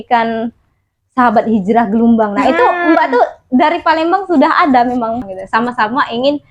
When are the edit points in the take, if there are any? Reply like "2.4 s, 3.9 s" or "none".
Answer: 5.3 s